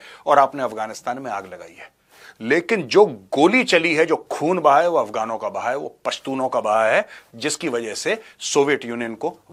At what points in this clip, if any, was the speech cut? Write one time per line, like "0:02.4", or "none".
none